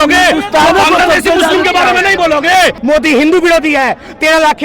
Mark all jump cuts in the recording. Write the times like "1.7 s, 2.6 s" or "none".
2.8 s